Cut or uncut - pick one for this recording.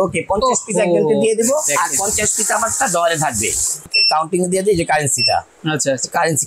cut